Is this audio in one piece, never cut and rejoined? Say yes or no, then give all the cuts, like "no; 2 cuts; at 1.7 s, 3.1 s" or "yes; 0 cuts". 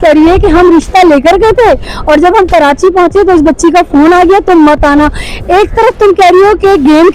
yes; 0 cuts